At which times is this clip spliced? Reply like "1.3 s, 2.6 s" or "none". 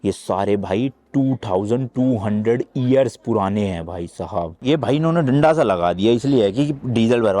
4.6 s